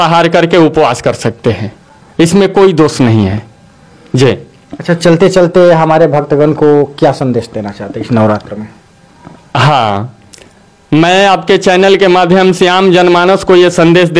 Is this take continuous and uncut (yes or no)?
yes